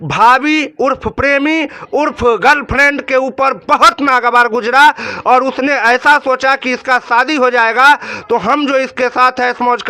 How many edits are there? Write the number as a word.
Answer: zero